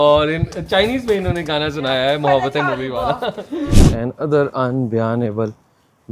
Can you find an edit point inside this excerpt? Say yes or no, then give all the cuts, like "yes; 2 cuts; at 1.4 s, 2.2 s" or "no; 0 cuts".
yes; 1 cut; at 3.8 s